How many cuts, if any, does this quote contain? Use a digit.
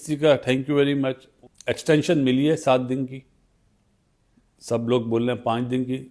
1